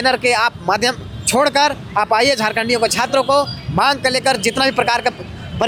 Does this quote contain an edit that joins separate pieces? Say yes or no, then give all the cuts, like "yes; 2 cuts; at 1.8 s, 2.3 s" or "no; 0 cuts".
no; 0 cuts